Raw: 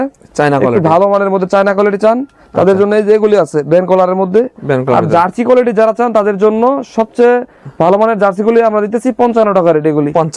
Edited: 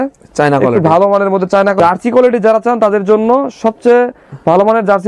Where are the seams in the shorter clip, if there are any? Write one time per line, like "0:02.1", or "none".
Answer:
0:01.8